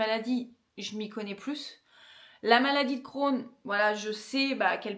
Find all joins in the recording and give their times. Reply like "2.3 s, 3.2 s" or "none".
none